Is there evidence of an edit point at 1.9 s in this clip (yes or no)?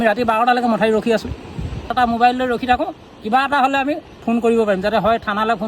yes